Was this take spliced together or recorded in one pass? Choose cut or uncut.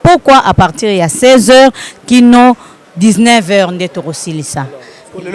uncut